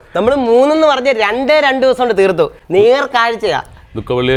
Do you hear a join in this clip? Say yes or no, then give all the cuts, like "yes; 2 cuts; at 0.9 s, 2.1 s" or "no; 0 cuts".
no; 0 cuts